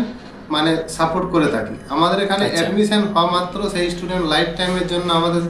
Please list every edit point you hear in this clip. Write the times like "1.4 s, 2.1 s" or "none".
none